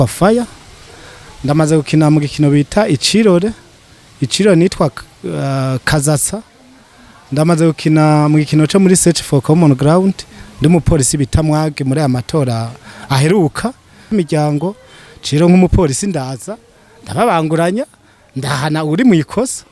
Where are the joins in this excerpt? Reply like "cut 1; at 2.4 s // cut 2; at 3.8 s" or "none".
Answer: cut 1; at 14.1 s